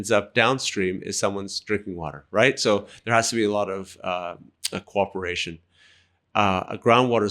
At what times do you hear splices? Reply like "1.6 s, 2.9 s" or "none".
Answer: none